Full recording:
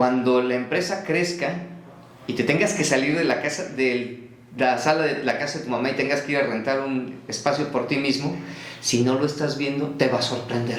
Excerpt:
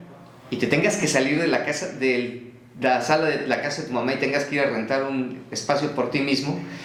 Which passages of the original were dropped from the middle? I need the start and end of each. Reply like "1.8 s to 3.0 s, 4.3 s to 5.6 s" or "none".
none